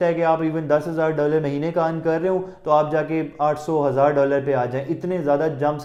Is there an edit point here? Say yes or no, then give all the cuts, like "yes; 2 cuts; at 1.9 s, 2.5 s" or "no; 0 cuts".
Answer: no; 0 cuts